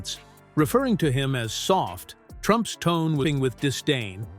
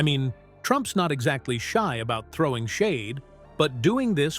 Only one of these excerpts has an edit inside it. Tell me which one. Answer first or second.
first